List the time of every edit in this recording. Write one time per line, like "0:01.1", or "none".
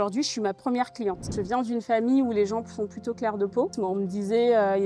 0:01.3
0:03.7